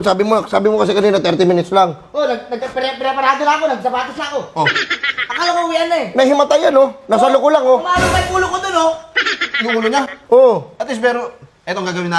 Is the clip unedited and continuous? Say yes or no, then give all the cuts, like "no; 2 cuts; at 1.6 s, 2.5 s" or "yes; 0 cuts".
yes; 0 cuts